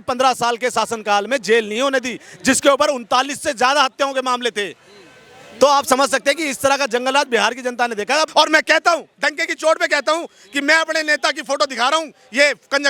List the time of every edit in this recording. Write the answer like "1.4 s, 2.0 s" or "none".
8.3 s